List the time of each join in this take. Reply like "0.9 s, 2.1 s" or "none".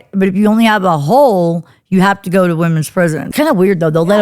3.3 s